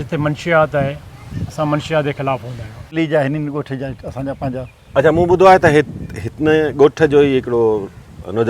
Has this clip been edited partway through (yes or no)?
yes